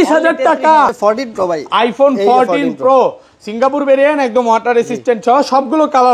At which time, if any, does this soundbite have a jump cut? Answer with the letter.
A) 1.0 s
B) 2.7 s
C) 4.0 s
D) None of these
A